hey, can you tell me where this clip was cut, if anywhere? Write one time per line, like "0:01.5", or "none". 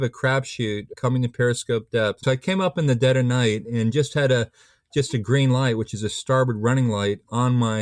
0:01.0
0:02.2